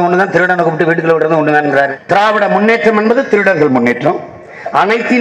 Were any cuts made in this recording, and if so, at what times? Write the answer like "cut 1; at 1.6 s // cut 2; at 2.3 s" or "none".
cut 1; at 2.0 s